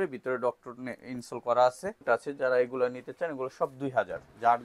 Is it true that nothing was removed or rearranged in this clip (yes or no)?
no